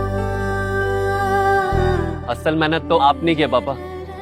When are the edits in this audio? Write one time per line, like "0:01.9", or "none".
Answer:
0:01.8

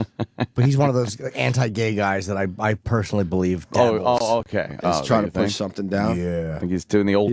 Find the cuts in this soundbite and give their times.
0:03.0

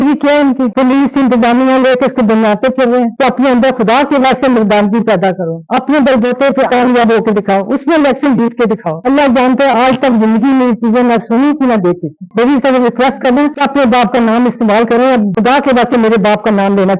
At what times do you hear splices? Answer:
0:03.1
0:09.0
0:12.2
0:15.3

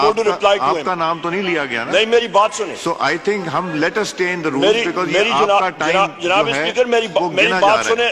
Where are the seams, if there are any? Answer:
none

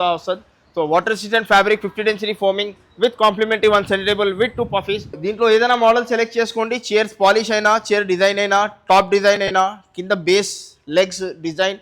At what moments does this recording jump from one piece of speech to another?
0:05.2

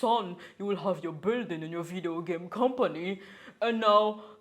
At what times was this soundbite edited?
none

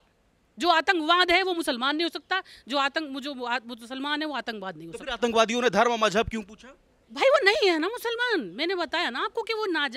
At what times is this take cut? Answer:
none

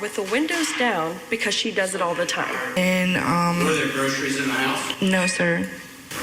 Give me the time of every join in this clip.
0:02.8

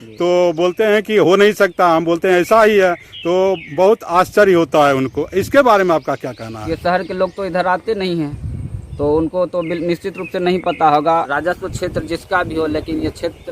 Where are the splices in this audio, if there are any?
0:06.3
0:11.3

